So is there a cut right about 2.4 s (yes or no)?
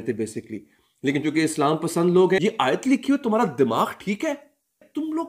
yes